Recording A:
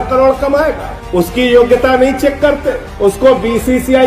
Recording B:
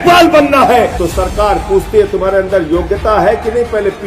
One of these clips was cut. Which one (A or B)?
B